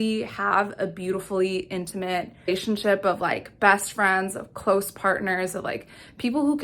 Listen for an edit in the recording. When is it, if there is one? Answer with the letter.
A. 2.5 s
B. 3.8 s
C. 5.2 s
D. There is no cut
A